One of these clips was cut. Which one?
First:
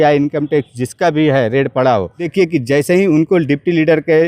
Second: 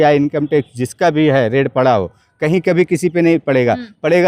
first; 1 cut; at 2.2 s

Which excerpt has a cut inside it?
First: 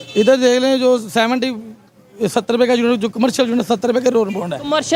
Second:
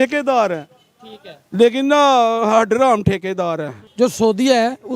second; 1 cut; at 3.8 s

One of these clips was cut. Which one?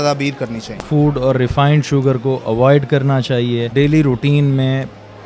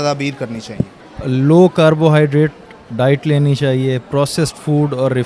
first; 2 cuts; at 0.8 s, 3.7 s

